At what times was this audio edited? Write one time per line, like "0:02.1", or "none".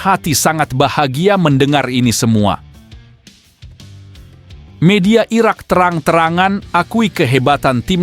0:02.6
0:04.6

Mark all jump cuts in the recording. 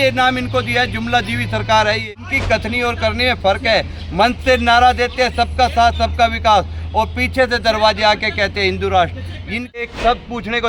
0:02.1
0:09.8

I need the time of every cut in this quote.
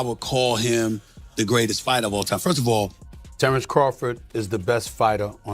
0:03.1

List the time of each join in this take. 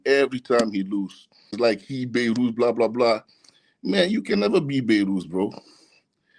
0:01.6

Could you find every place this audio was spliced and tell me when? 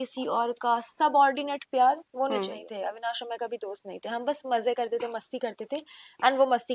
0:02.6

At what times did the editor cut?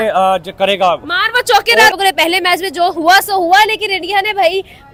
none

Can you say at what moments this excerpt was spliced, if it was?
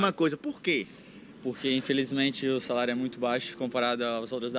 none

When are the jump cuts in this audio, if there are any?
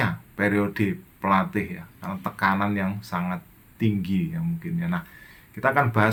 none

